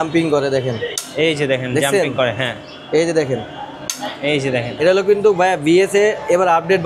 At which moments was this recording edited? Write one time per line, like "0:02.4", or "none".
0:04.7